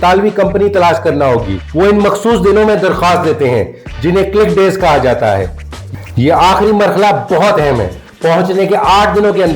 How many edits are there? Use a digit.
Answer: 2